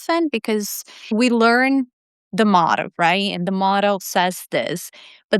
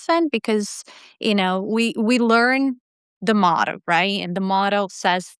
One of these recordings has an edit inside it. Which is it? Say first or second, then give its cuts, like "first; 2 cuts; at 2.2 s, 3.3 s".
first; 1 cut; at 1.1 s